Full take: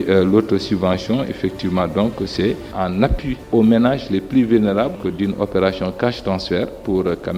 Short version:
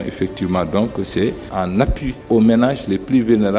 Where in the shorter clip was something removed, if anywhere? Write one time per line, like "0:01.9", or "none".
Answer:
none